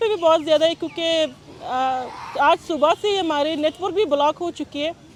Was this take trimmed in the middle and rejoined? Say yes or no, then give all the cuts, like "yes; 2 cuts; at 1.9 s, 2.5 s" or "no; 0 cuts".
no; 0 cuts